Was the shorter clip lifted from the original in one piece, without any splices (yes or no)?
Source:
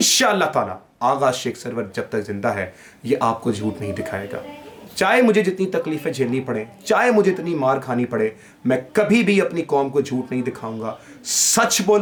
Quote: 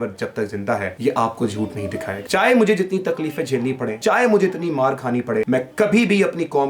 no